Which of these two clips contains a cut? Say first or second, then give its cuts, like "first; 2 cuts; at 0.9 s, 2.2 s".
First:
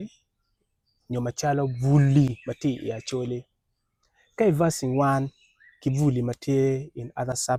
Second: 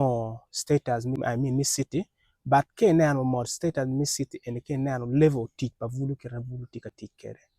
second; 1 cut; at 1.2 s